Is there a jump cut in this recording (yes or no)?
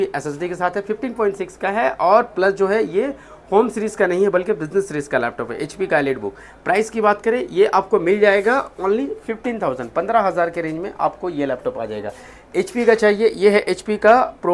no